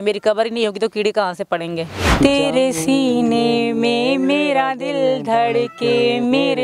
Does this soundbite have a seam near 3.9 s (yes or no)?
no